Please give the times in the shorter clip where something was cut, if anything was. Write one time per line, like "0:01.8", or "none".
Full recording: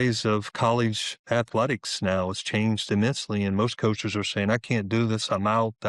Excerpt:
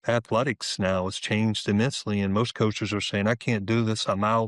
none